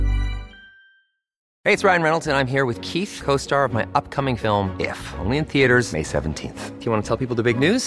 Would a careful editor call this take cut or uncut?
cut